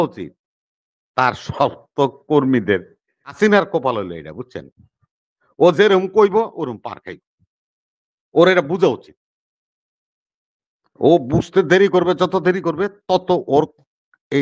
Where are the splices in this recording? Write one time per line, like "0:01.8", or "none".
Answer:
0:03.3